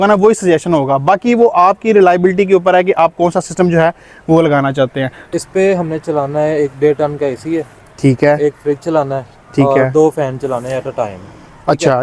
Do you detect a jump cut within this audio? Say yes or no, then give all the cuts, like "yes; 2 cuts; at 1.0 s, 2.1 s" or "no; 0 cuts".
yes; 1 cut; at 5.2 s